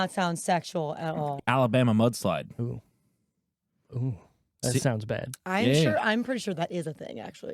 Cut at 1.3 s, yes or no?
yes